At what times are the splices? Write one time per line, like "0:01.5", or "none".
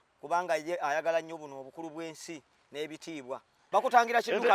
0:03.6